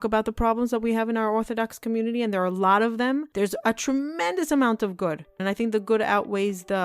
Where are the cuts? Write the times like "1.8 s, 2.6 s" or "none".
3.3 s, 5.4 s

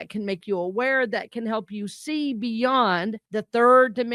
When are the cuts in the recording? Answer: 3.2 s

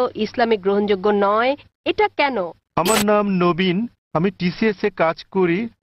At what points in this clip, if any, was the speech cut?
2.6 s

